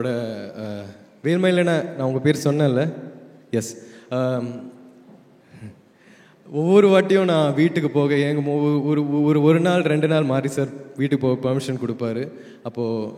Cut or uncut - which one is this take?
uncut